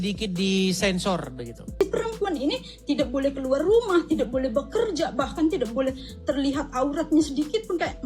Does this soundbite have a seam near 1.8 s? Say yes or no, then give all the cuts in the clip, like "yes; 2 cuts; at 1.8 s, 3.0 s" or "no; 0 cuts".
yes; 1 cut; at 1.8 s